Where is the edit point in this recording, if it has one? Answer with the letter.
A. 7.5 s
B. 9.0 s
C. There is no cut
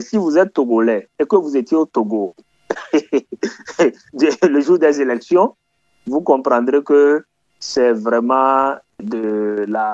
B